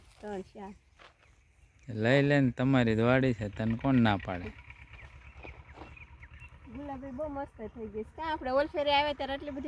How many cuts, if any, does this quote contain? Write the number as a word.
zero